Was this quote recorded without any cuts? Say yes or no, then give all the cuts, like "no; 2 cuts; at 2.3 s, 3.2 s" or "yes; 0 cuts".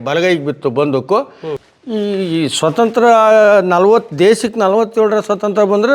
no; 1 cut; at 1.5 s